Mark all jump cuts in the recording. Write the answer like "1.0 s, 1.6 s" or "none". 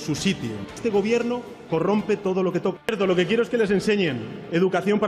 0.8 s, 2.9 s